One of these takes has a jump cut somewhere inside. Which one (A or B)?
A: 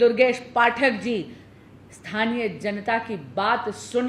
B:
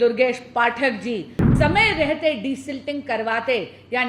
B